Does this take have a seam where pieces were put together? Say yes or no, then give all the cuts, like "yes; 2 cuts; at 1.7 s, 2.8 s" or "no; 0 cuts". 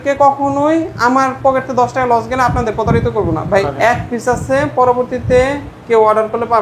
yes; 1 cut; at 3.7 s